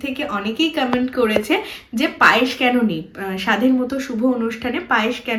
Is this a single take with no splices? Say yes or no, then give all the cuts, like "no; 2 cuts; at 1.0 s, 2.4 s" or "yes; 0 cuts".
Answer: yes; 0 cuts